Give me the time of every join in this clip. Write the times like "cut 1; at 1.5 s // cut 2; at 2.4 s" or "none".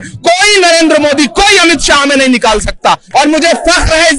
cut 1; at 3.0 s

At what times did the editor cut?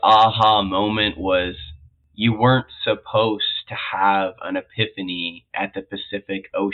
none

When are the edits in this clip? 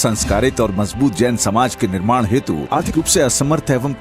cut 1; at 2.9 s

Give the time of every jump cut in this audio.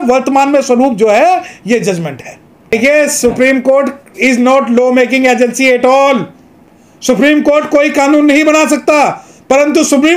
cut 1; at 2.5 s

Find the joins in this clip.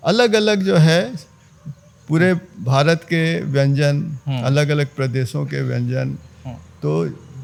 none

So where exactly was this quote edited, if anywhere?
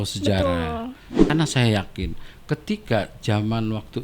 cut 1; at 1.1 s

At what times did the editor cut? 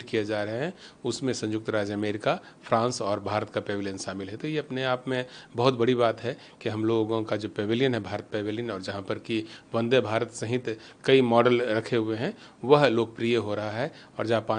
none

